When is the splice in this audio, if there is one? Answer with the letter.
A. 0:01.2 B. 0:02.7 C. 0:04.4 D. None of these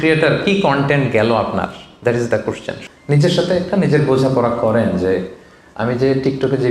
B